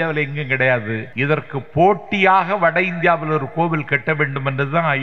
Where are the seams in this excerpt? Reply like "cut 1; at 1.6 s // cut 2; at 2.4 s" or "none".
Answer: cut 1; at 1.1 s